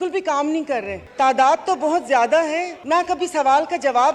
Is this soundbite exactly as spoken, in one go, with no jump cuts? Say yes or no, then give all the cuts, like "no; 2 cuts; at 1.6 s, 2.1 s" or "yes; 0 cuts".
no; 2 cuts; at 1.0 s, 2.7 s